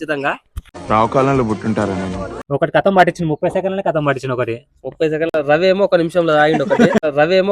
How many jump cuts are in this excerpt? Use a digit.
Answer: 1